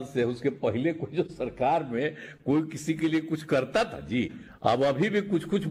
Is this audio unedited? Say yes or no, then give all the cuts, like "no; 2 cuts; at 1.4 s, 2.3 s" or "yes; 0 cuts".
no; 1 cut; at 4.4 s